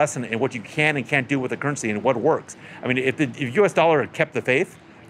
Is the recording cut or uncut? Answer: uncut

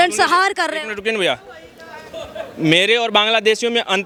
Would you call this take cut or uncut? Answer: uncut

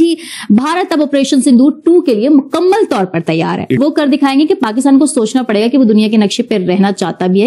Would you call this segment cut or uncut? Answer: cut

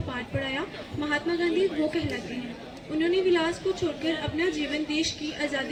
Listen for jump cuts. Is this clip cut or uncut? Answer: uncut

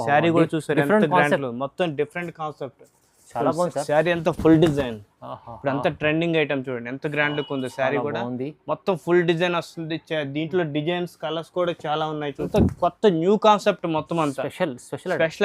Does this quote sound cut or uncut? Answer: cut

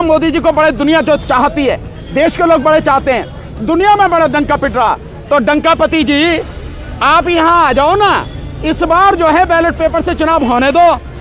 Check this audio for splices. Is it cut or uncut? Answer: uncut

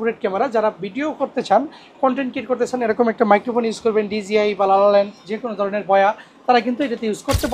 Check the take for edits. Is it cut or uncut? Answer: uncut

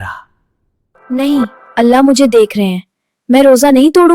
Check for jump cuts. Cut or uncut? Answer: cut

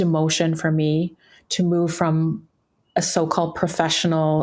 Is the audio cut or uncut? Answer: uncut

